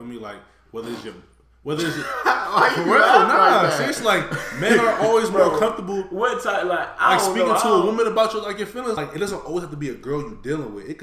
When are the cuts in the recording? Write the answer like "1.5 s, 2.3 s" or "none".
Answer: 9.0 s